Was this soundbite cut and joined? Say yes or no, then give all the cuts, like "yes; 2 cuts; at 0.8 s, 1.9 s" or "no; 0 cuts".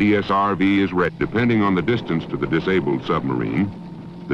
no; 0 cuts